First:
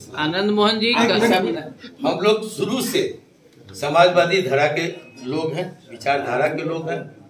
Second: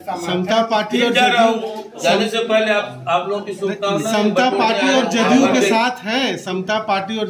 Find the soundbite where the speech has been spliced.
first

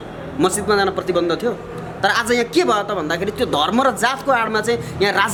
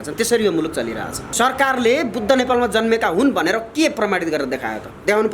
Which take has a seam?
second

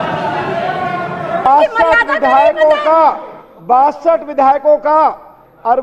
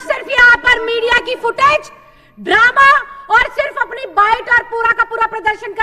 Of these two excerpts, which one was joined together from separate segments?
first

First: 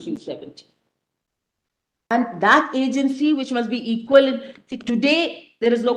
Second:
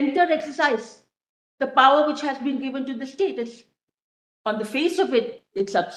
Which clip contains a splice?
first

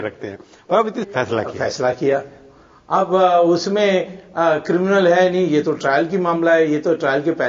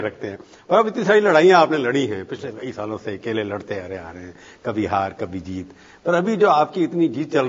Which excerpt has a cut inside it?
second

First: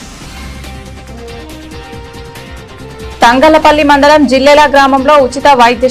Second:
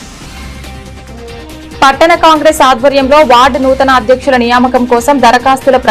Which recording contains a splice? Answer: second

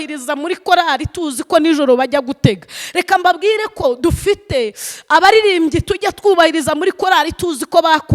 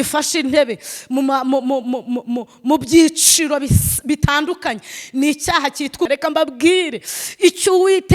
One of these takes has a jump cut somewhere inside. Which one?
second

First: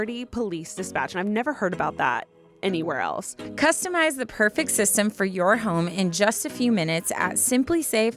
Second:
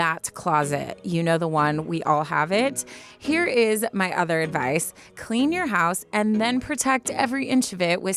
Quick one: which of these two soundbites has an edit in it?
first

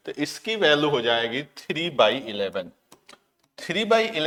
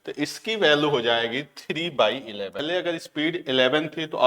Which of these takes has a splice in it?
second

